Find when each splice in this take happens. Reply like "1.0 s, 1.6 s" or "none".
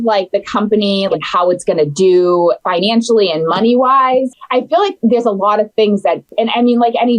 1.1 s, 2.6 s, 6.3 s